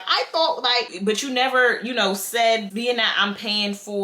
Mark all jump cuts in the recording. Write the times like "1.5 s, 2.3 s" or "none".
0.9 s, 2.7 s